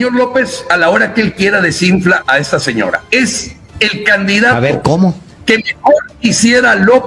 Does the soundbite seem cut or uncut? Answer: uncut